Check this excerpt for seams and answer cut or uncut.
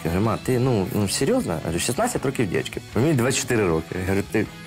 cut